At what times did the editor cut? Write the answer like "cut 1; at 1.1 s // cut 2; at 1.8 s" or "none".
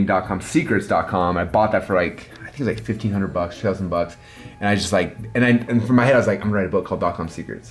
none